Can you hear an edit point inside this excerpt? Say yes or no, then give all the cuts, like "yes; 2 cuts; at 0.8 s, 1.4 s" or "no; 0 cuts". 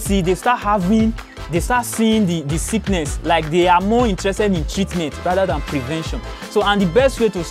no; 0 cuts